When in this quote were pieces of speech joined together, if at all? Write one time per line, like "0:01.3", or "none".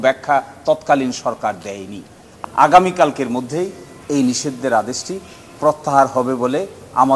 0:02.3